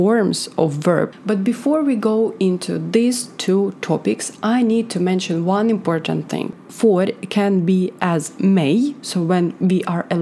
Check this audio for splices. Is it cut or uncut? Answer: cut